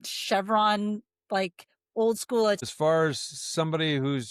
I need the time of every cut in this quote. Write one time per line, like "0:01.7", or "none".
0:02.6